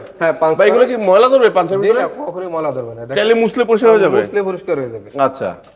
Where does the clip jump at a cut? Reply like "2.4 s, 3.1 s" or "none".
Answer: none